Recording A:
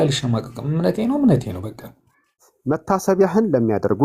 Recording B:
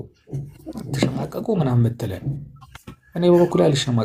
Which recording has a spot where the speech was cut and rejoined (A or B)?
A